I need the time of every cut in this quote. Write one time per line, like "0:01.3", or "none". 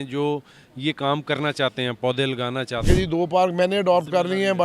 0:02.9